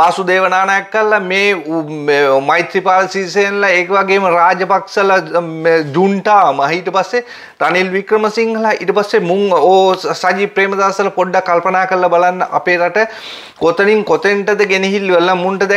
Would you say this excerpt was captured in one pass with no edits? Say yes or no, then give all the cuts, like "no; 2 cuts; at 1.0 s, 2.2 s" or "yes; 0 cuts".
yes; 0 cuts